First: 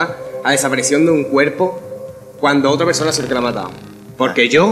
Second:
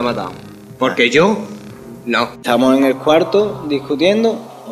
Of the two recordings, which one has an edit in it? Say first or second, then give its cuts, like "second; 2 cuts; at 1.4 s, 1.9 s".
second; 1 cut; at 2.3 s